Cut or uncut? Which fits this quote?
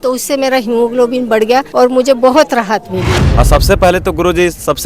cut